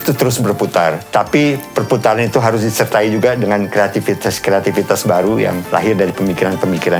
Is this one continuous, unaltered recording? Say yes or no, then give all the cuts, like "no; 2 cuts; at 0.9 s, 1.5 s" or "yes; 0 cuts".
no; 2 cuts; at 1.0 s, 5.6 s